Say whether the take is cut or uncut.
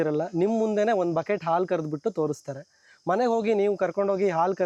uncut